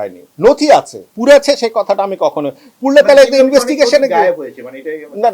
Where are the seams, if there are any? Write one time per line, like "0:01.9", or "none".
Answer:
0:01.0